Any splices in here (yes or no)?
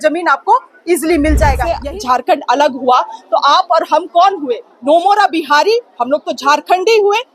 yes